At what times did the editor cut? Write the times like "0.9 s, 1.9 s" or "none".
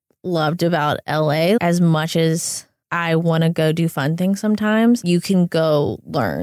1.6 s, 5.0 s